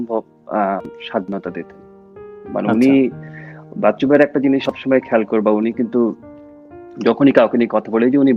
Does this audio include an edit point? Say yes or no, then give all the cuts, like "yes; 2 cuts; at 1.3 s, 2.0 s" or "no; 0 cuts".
no; 0 cuts